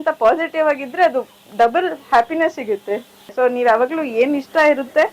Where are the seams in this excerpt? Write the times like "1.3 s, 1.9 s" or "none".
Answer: 3.3 s